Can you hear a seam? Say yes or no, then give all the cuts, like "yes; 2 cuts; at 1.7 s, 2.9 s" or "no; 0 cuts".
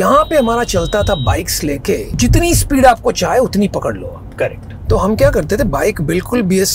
yes; 2 cuts; at 2.1 s, 4.7 s